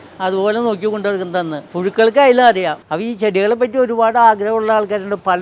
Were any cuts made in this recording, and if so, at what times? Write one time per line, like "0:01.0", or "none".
0:01.6
0:02.9